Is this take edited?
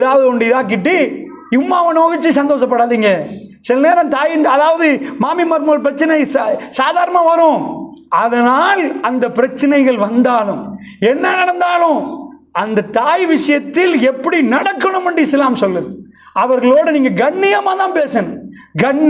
yes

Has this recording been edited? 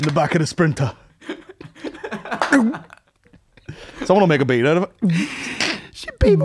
no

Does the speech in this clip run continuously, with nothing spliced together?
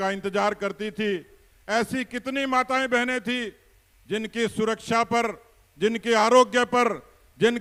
yes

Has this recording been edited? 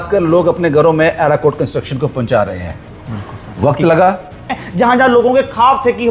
yes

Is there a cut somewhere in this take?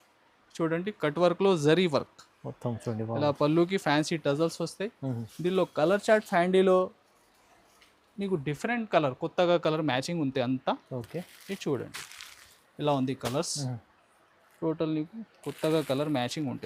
no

